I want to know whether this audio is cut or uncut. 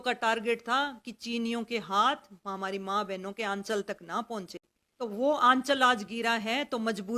cut